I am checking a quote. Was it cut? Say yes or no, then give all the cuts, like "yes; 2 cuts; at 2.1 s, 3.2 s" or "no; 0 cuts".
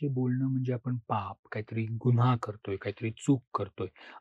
no; 0 cuts